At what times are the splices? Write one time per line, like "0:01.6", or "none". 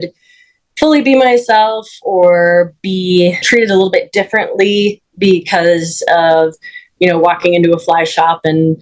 none